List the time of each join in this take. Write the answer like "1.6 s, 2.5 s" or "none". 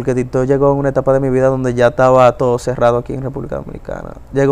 none